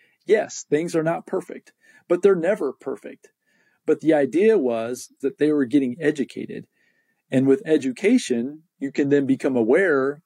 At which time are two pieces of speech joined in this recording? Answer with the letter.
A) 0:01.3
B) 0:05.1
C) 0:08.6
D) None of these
B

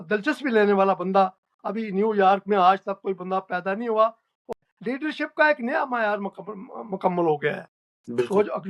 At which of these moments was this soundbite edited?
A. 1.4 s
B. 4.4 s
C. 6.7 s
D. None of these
B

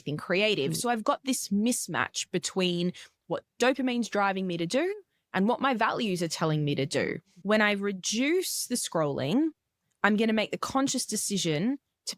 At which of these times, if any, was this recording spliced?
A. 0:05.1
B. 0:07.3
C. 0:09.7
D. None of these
B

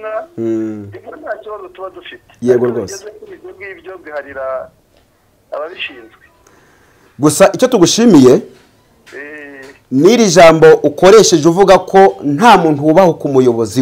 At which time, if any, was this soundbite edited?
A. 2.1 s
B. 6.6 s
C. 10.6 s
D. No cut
D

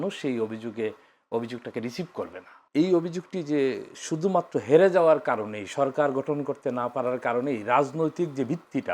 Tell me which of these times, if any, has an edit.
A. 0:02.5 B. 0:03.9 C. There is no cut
A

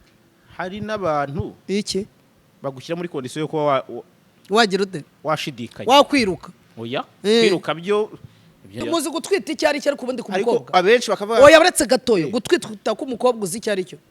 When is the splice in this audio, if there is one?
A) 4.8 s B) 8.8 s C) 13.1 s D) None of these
B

